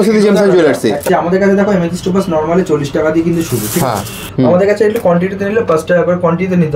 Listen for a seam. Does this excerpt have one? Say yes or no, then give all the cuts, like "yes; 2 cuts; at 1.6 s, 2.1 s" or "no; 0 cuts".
yes; 2 cuts; at 1.0 s, 4.2 s